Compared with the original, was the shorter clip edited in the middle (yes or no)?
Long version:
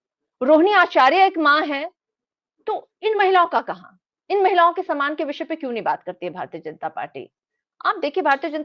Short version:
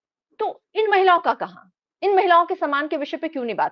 no